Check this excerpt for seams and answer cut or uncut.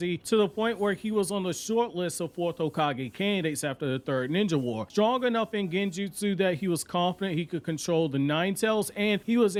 uncut